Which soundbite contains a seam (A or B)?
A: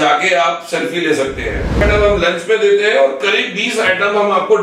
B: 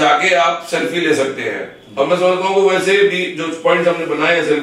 A